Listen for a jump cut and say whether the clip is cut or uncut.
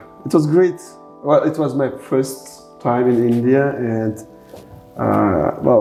uncut